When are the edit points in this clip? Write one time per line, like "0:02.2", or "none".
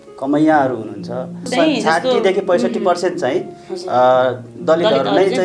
0:01.5